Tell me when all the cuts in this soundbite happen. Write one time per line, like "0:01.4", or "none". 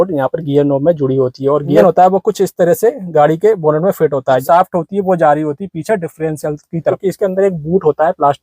0:01.8
0:04.4
0:07.0